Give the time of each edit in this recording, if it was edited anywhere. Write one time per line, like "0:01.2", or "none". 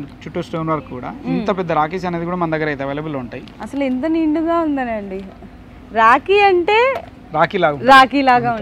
0:03.4